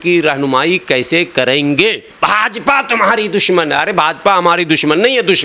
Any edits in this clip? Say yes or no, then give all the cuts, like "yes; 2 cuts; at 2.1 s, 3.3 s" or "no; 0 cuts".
yes; 1 cut; at 2.1 s